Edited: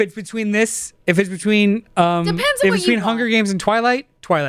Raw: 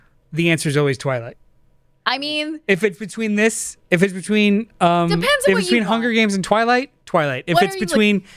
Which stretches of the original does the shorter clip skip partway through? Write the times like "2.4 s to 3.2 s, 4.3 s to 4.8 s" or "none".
none